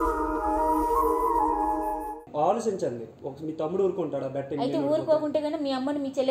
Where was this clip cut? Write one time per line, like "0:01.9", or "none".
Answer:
0:02.3